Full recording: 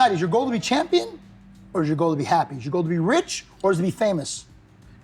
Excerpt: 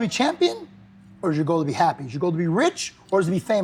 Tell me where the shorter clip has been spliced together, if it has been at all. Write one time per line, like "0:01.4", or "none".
none